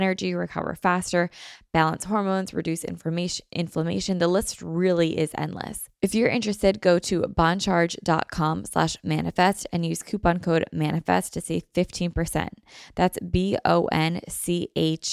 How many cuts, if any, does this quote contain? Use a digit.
1